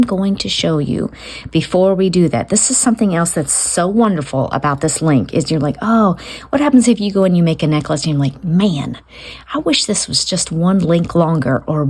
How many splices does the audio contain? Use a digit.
0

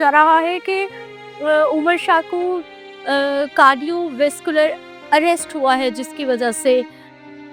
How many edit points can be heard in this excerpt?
0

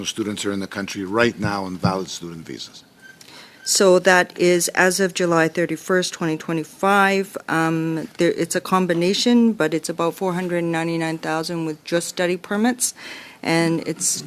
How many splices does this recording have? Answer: 0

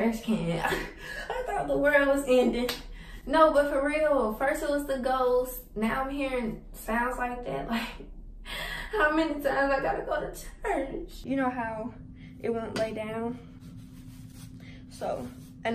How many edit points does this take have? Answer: 1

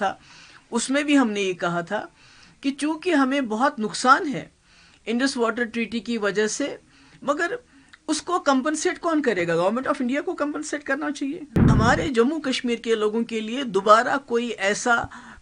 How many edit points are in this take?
1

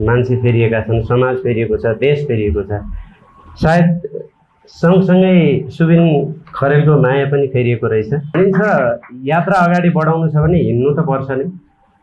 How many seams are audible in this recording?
1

